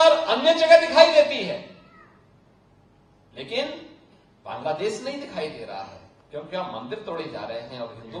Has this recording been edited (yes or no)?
no